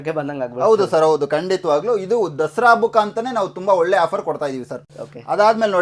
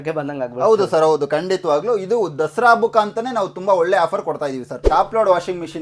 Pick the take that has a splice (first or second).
second